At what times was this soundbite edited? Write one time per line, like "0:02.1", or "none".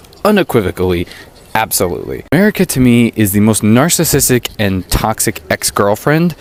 none